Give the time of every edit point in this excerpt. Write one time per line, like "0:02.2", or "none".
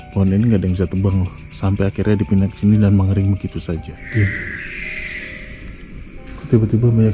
0:04.0